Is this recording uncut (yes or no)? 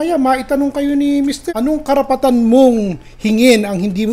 yes